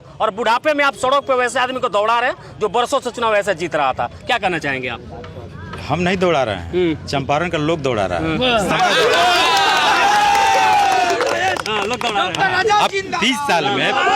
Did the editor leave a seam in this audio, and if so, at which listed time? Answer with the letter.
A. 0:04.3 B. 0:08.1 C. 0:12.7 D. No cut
D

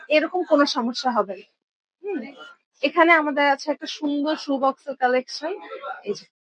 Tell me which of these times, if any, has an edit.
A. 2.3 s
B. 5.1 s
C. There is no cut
A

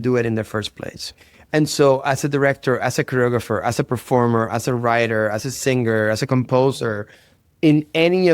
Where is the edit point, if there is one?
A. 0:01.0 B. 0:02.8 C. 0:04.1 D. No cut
A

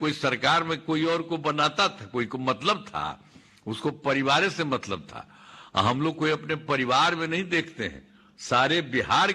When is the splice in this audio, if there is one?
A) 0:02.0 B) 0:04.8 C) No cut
C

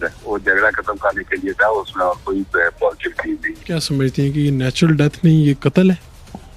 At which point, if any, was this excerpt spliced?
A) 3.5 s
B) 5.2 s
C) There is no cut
A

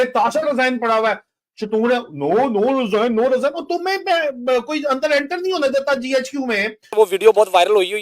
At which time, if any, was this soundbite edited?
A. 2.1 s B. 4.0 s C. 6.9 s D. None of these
C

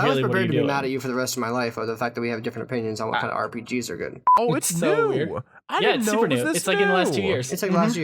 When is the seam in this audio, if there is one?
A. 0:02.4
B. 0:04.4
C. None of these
B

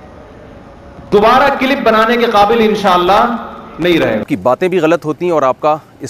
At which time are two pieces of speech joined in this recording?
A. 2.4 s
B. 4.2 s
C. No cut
B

